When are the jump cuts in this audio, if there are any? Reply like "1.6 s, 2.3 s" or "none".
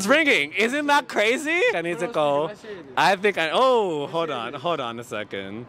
1.8 s